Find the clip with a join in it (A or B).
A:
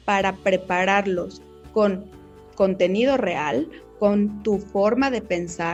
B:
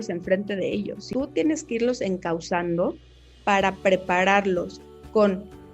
B